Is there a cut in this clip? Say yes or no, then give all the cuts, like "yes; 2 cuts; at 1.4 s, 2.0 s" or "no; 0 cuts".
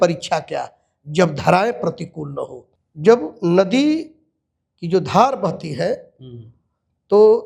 no; 0 cuts